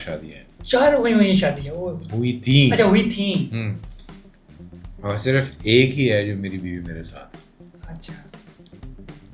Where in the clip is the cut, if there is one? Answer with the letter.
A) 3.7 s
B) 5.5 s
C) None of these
C